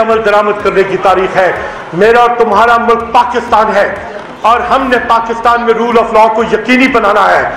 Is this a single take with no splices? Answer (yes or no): yes